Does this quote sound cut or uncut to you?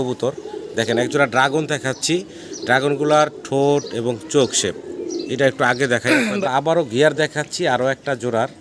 cut